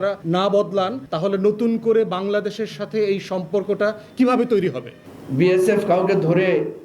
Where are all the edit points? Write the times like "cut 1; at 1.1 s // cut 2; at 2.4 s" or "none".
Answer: cut 1; at 4.9 s

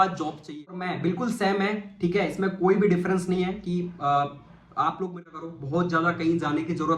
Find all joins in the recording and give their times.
cut 1; at 0.9 s // cut 2; at 5.3 s

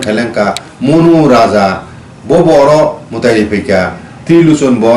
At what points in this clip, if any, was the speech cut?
none

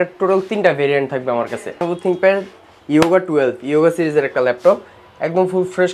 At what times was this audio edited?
cut 1; at 1.8 s

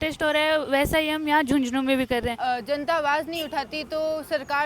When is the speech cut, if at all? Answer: cut 1; at 2.3 s

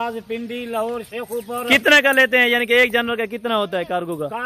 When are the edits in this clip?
none

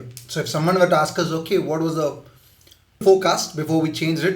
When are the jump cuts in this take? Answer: cut 1; at 3.0 s

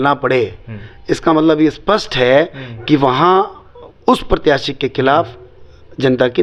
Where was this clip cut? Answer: none

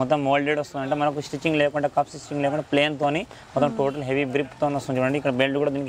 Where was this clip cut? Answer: none

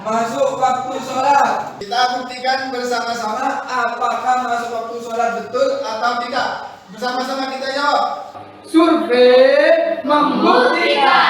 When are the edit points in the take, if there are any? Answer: cut 1; at 1.8 s

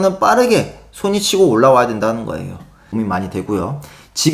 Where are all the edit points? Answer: cut 1; at 2.9 s

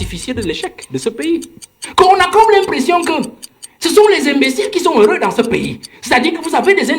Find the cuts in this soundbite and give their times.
cut 1; at 1.8 s

